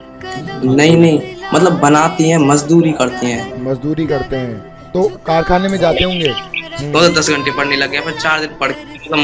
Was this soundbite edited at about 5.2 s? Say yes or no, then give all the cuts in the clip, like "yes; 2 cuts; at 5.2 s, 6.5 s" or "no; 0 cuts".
no; 1 cut; at 6.7 s